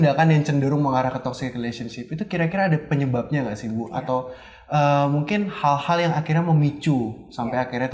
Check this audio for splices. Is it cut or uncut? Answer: uncut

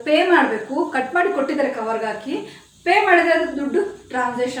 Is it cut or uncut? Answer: uncut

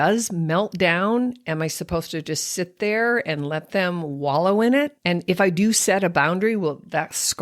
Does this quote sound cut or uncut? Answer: cut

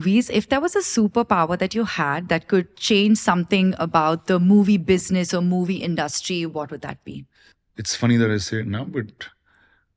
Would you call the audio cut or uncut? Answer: uncut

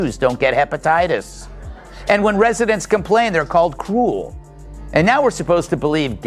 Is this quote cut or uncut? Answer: uncut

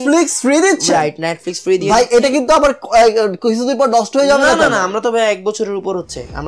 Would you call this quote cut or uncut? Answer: uncut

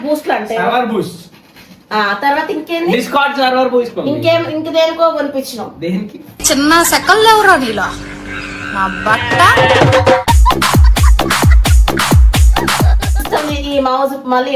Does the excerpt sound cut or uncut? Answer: cut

